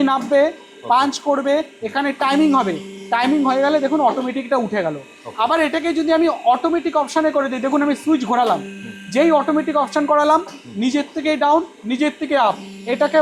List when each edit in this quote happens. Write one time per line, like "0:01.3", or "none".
none